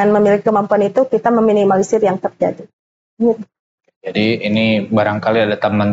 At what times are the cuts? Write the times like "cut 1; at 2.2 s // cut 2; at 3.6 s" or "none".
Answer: none